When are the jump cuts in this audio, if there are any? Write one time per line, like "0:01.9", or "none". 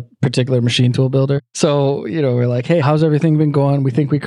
0:01.5